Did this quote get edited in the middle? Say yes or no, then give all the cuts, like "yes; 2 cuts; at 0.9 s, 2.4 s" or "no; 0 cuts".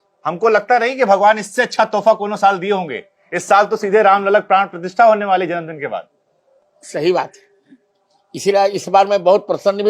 no; 0 cuts